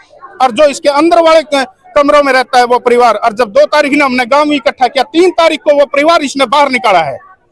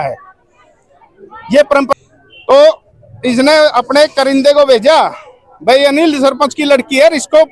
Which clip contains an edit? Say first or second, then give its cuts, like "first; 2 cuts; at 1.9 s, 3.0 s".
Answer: second; 1 cut; at 1.9 s